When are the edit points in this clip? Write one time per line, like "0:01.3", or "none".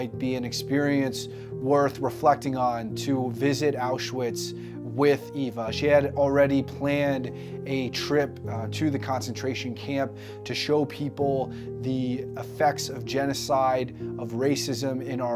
none